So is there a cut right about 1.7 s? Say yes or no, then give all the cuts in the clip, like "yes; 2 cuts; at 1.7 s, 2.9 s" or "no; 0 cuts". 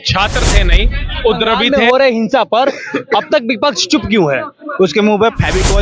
yes; 1 cut; at 1.7 s